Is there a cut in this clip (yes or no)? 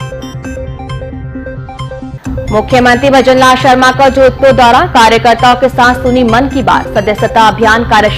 yes